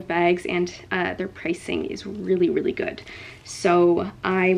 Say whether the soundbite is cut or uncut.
uncut